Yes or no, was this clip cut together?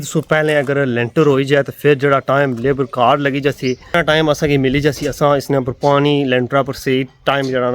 yes